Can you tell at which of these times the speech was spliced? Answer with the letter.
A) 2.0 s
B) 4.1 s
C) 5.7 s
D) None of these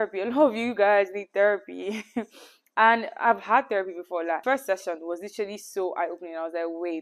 D